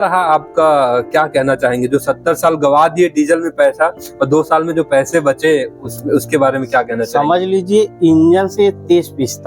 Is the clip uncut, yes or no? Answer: yes